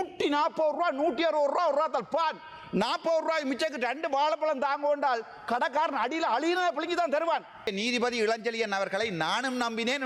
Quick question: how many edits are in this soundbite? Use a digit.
1